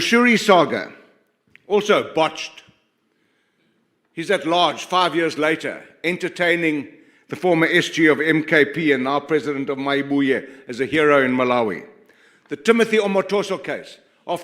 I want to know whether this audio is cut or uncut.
uncut